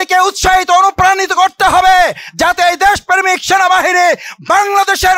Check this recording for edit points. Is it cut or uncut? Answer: uncut